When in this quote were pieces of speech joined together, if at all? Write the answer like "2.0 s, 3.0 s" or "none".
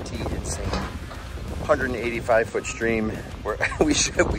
none